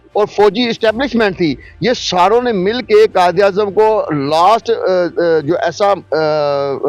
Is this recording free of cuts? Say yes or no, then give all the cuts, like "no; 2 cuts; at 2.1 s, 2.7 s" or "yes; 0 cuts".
yes; 0 cuts